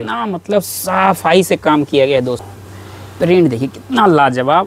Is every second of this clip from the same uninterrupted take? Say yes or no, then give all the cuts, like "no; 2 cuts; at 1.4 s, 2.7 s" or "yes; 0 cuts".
no; 1 cut; at 2.4 s